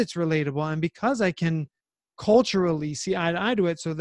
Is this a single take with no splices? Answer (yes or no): yes